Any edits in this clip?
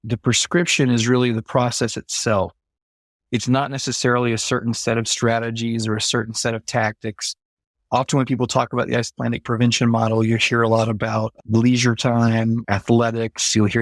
no; 0 cuts

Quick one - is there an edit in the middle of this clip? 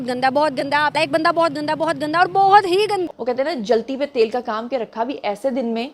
no; 0 cuts

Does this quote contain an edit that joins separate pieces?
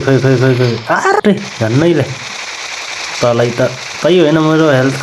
yes; 1 cut; at 1.2 s

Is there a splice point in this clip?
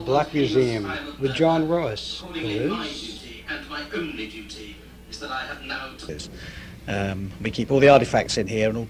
no; 0 cuts

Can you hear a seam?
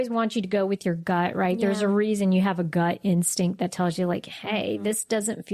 no; 0 cuts

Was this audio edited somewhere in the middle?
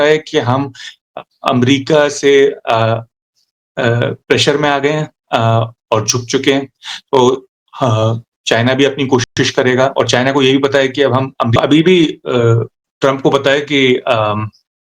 yes; 1 cut; at 11.5 s

